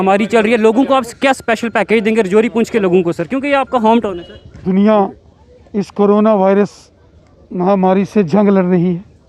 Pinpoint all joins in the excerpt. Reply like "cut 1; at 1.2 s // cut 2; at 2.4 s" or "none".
cut 1; at 4.6 s